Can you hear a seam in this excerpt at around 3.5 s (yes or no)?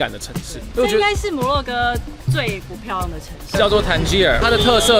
yes